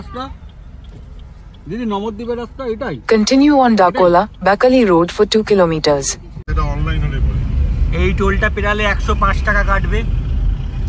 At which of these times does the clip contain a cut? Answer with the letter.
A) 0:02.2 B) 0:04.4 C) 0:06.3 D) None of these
C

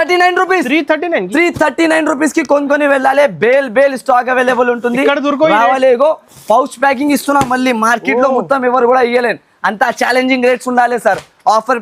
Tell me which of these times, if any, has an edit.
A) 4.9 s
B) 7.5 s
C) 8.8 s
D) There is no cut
D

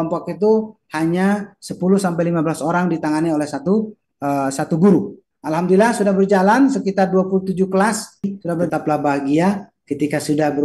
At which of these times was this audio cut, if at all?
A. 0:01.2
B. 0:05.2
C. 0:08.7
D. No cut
C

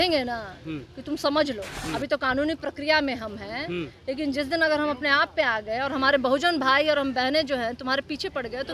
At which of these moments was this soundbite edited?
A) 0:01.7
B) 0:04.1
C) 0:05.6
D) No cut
A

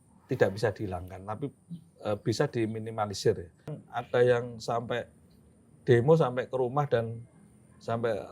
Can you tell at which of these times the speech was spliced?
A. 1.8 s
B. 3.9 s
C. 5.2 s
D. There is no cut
B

